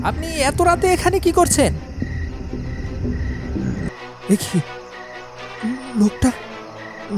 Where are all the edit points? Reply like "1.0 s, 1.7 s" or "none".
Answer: 3.9 s